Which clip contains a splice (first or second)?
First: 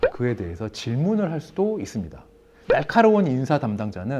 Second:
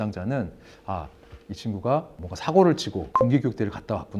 first